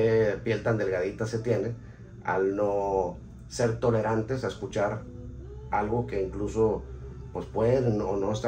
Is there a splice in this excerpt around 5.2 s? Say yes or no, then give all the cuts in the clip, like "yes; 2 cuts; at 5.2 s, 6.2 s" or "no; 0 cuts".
no; 0 cuts